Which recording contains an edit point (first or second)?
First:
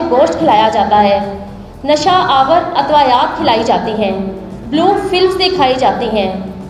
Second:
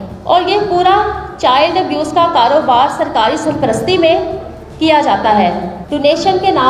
second